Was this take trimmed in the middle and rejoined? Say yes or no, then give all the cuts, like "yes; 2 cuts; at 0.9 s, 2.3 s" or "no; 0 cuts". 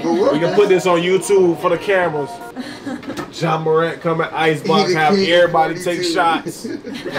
yes; 1 cut; at 3.2 s